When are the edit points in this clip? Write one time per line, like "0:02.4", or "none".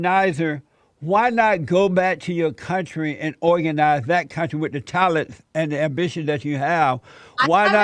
none